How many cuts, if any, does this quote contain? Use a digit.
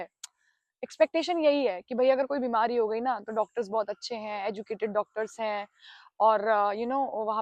0